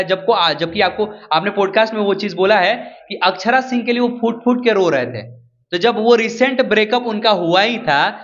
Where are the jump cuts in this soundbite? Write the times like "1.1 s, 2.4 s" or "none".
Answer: none